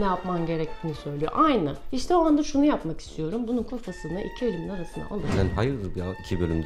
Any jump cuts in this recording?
yes; 1 cut; at 5.3 s

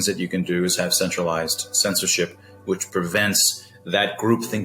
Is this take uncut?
yes; 0 cuts

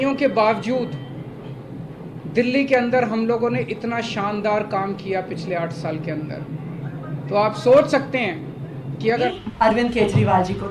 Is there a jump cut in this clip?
yes; 1 cut; at 9.3 s

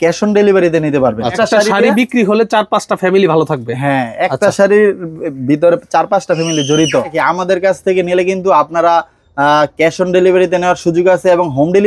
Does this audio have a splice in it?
yes; 2 cuts; at 1.3 s, 7.1 s

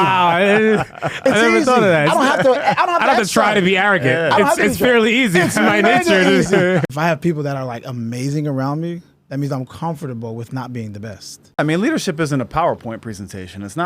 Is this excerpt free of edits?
no; 2 cuts; at 6.9 s, 11.6 s

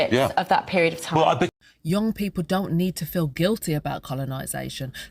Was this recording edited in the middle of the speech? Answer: no; 0 cuts

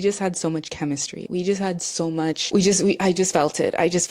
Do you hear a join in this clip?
yes; 1 cut; at 2.4 s

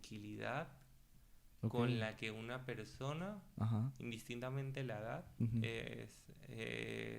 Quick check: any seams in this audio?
no; 0 cuts

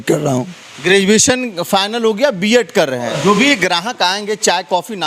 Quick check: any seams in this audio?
yes; 1 cut; at 3.1 s

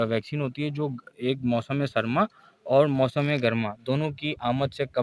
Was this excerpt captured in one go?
yes; 0 cuts

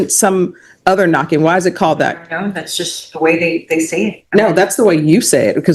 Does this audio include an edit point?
no; 0 cuts

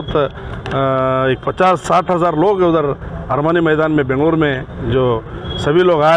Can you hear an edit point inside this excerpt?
no; 0 cuts

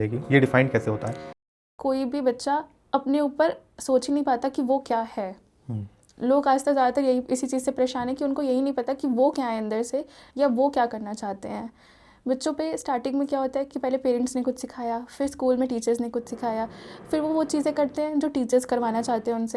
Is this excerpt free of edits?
no; 1 cut; at 1.4 s

